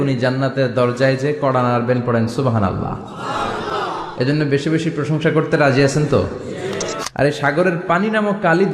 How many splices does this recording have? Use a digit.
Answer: 1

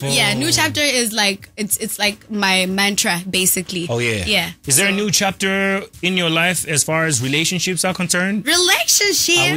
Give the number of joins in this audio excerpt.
0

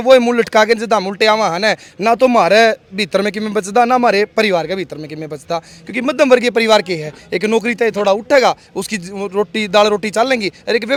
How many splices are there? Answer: 0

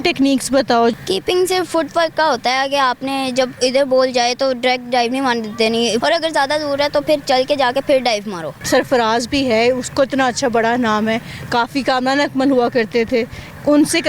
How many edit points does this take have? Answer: 3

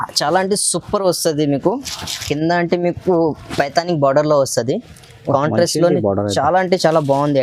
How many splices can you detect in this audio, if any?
0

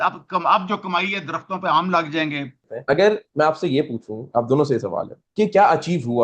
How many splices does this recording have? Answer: 1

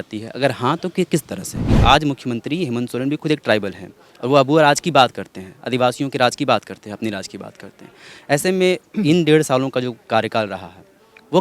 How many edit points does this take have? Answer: 1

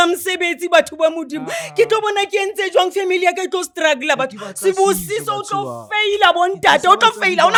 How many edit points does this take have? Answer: 0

